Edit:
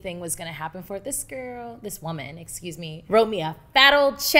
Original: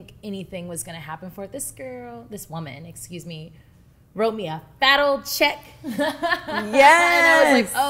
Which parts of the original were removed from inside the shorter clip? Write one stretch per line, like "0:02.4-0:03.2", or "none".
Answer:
0:03.5-0:04.1